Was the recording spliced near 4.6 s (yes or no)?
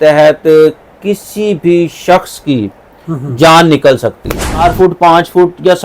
yes